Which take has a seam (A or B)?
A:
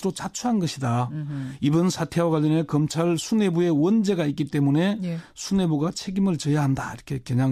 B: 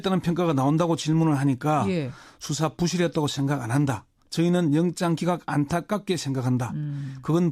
B